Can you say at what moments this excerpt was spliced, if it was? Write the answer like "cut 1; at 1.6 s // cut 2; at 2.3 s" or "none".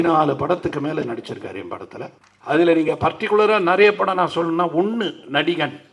cut 1; at 2.3 s